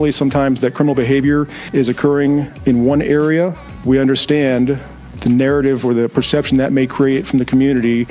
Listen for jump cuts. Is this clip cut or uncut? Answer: cut